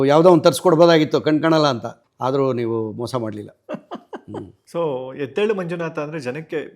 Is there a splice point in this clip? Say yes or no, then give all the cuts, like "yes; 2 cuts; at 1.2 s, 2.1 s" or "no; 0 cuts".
yes; 1 cut; at 4.6 s